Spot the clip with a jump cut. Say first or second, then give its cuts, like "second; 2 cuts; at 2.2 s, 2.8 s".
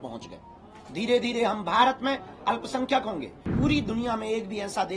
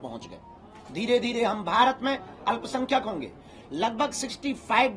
first; 1 cut; at 3.5 s